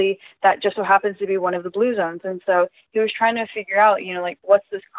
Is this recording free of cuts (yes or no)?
yes